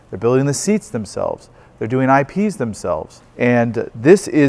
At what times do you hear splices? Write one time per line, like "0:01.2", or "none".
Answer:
none